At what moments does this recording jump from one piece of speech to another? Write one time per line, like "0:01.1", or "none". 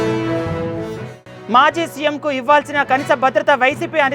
0:00.9